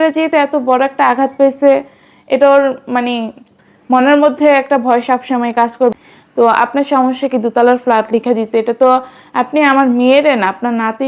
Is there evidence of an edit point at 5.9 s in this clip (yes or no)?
yes